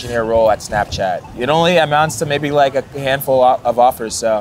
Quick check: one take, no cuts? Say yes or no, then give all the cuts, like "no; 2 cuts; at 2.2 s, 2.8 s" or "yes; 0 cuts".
yes; 0 cuts